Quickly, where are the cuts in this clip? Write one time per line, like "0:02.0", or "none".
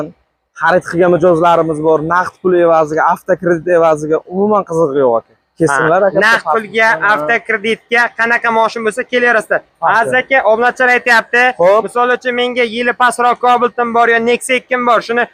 none